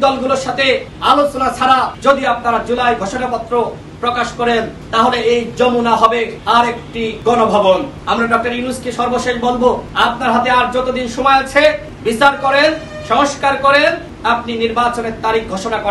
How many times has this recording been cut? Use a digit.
8